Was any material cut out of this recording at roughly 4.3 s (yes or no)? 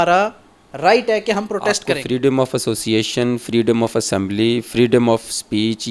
no